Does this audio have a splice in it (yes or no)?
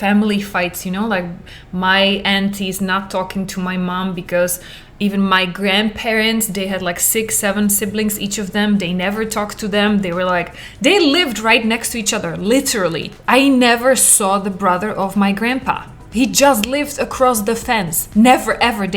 yes